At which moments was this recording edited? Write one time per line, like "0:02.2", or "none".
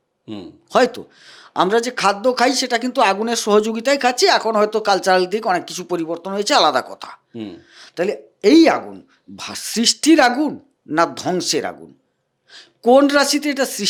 none